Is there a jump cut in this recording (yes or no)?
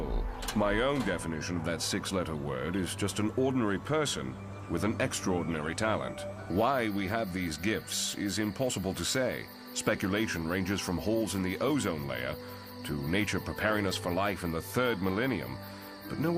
no